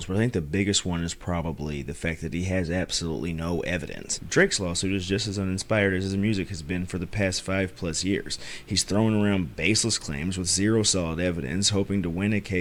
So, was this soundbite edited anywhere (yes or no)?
no